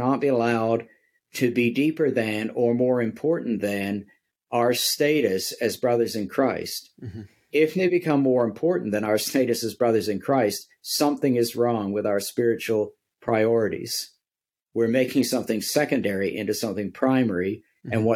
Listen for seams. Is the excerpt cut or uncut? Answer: uncut